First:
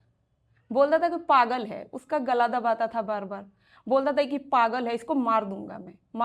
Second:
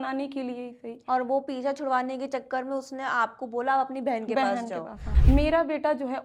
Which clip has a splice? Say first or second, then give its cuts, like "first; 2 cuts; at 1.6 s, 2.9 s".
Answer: second; 1 cut; at 5.1 s